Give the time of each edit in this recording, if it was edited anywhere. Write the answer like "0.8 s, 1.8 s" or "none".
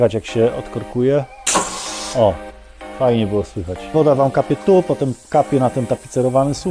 3.9 s